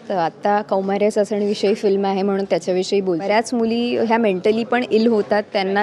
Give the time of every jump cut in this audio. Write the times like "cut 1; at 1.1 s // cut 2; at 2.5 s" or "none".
cut 1; at 3.3 s